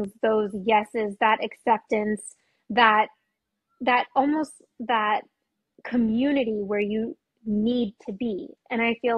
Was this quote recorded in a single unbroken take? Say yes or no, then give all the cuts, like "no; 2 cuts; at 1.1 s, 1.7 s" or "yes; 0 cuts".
yes; 0 cuts